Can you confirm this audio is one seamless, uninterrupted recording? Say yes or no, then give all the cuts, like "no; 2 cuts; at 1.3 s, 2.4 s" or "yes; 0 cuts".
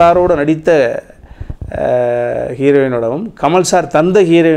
yes; 0 cuts